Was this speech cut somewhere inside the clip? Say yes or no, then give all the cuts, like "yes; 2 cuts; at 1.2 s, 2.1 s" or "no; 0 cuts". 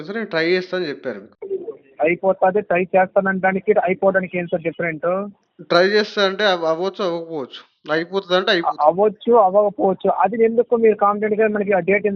no; 0 cuts